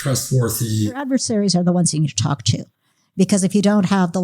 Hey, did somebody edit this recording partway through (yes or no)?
yes